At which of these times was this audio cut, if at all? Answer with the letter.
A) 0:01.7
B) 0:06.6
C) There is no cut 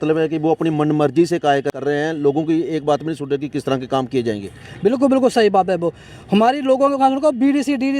A